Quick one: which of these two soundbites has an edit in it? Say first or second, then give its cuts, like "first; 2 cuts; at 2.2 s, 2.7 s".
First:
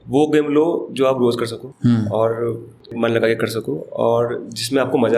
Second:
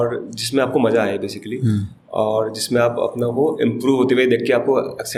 first; 2 cuts; at 1.6 s, 2.9 s